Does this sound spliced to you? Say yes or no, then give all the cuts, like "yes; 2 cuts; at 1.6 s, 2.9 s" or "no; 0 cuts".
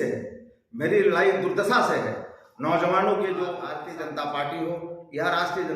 yes; 1 cut; at 3.8 s